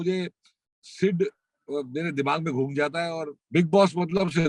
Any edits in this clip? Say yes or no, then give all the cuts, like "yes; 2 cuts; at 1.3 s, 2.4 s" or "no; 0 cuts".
yes; 1 cut; at 3.3 s